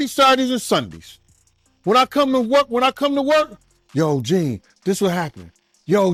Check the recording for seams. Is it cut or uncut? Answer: uncut